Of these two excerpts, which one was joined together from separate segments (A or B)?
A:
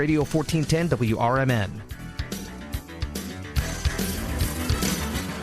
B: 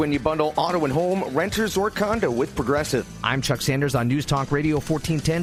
A